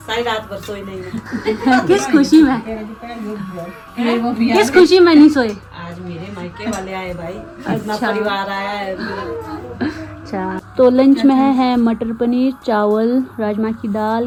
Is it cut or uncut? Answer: uncut